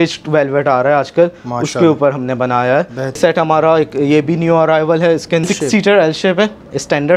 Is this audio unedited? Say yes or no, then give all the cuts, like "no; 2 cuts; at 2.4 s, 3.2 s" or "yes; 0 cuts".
no; 2 cuts; at 3.2 s, 5.5 s